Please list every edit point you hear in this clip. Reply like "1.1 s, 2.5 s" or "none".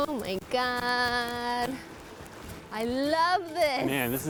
none